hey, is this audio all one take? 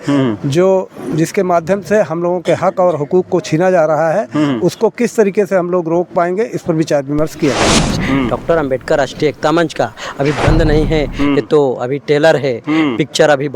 no; 1 cut; at 7.8 s

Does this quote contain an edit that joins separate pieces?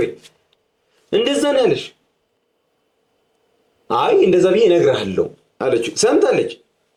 no; 0 cuts

